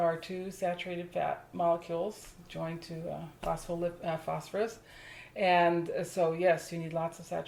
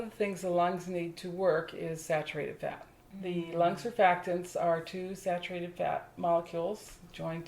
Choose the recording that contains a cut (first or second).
second